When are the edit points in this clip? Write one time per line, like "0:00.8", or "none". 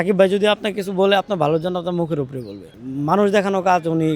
0:02.8